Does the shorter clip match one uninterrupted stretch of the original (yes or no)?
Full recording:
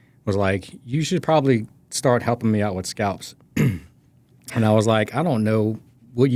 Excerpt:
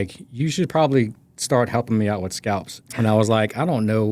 no